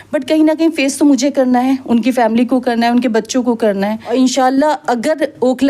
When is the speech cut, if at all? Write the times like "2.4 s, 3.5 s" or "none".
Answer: 4.1 s